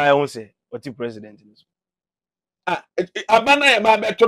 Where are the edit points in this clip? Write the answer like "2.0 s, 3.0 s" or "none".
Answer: none